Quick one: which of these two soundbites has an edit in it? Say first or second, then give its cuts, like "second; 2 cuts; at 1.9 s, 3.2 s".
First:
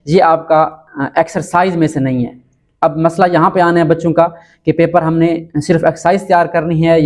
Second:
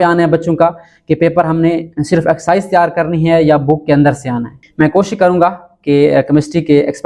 second; 1 cut; at 4.6 s